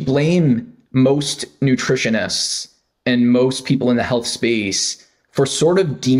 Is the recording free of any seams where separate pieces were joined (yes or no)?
yes